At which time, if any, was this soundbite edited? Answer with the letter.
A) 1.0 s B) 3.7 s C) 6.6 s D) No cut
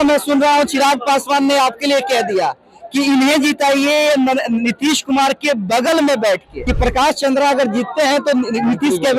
C